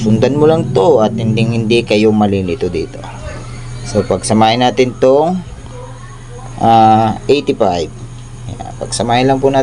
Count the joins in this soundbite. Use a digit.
0